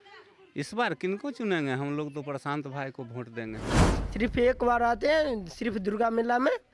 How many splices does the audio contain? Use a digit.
1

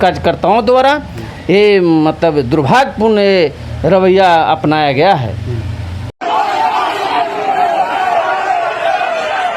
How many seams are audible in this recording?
0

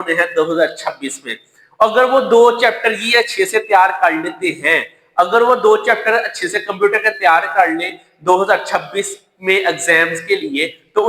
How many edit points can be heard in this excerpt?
0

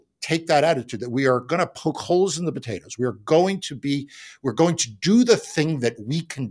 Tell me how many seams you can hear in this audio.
0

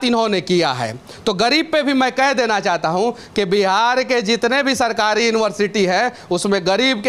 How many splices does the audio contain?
0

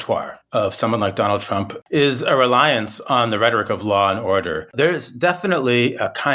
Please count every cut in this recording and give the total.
1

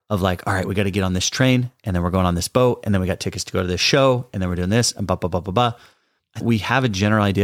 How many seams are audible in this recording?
1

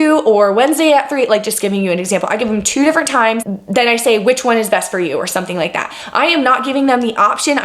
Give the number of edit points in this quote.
1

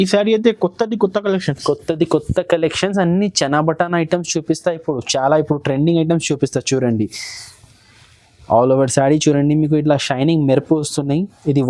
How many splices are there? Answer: 0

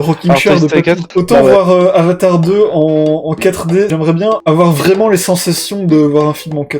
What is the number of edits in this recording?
2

